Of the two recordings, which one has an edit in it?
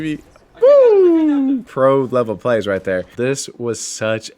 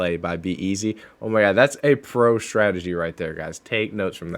first; 2 cuts; at 1.7 s, 3.1 s

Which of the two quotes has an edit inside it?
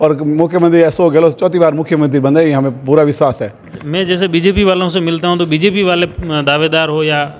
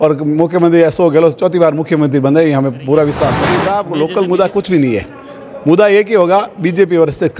second; 1 cut; at 3.7 s

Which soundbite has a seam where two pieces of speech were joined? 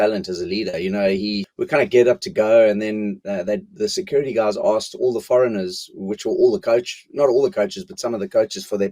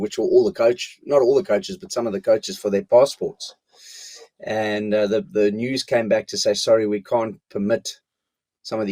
first; 1 cut; at 1.5 s

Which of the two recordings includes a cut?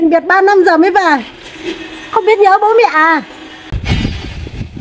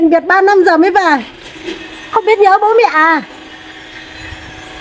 first; 1 cut; at 3.7 s

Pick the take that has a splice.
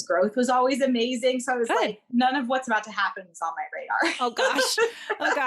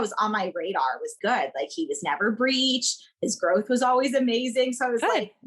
second; 1 cut; at 1.1 s

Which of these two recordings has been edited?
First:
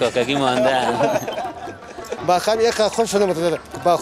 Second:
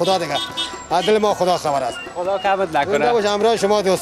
first; 1 cut; at 2.1 s

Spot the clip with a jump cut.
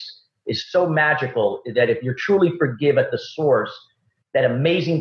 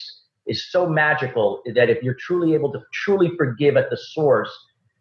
first; 1 cut; at 2.1 s

